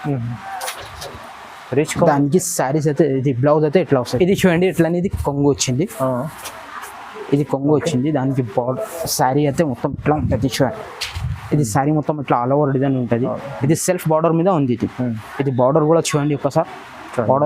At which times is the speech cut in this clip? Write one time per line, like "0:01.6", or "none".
0:04.1

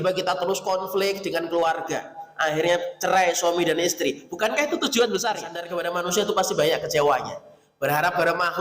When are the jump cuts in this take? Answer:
0:05.7

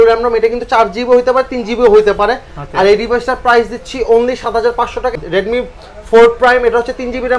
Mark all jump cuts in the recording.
0:05.1

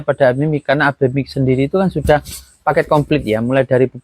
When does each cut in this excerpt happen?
none

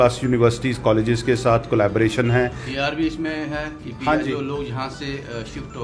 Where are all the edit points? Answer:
0:02.6

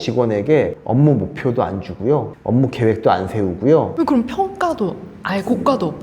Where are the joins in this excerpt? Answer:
0:03.9

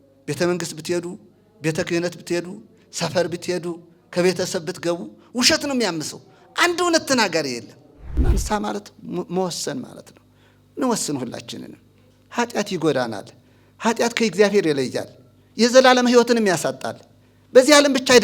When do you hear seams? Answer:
0:08.2

